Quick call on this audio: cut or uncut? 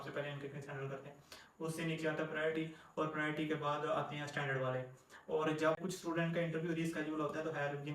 cut